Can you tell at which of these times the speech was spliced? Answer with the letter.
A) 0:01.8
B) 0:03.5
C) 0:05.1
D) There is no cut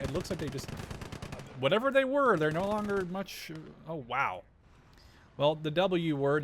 D